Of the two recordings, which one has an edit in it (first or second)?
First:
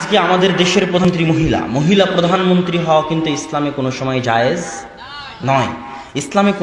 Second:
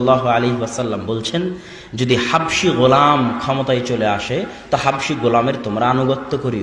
first